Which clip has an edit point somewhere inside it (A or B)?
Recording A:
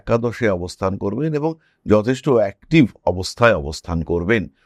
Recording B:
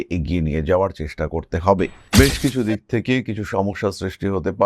B